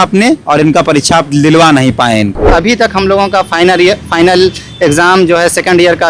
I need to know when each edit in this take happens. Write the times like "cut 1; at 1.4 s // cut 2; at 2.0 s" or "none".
cut 1; at 2.4 s